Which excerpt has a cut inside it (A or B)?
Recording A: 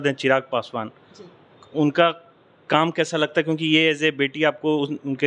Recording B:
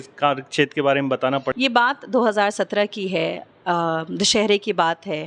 B